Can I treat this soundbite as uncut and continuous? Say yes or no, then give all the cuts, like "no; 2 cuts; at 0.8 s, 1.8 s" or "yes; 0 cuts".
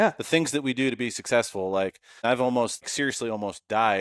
no; 2 cuts; at 2.2 s, 2.9 s